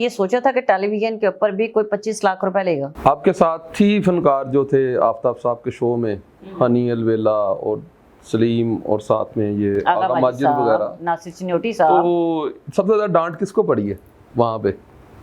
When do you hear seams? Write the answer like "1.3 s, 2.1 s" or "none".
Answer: 2.9 s